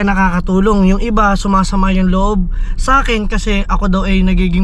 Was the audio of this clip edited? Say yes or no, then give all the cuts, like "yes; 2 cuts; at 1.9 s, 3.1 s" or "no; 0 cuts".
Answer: no; 0 cuts